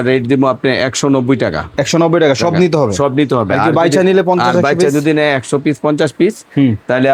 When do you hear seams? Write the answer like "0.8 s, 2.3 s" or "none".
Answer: none